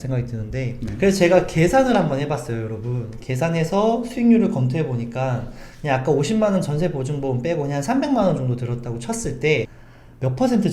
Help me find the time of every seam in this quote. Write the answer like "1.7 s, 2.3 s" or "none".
0.9 s, 9.8 s